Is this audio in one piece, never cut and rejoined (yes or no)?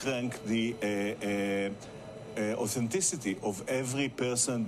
yes